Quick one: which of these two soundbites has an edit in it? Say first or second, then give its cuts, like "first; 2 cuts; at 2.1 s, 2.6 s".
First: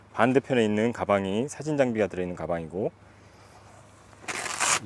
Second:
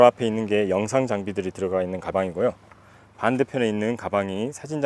second; 1 cut; at 2.1 s